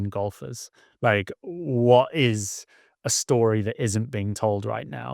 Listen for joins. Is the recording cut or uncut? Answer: uncut